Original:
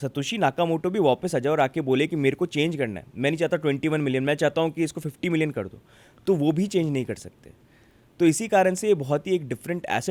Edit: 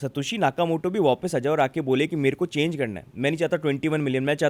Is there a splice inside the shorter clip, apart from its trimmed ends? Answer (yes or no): no